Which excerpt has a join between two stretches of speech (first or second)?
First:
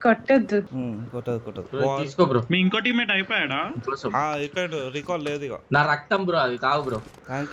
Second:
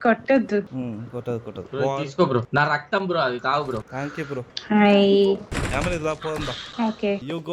second